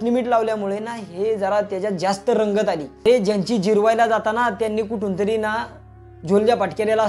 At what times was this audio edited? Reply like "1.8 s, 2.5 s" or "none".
2.9 s